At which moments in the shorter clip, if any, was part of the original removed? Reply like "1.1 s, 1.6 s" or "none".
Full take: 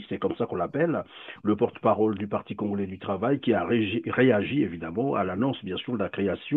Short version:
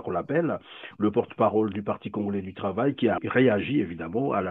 3.2 s